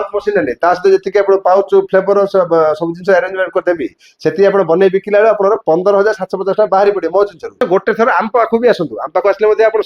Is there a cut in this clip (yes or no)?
yes